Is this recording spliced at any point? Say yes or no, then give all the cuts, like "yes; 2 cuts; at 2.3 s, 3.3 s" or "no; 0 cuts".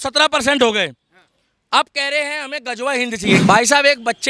yes; 1 cut; at 3.4 s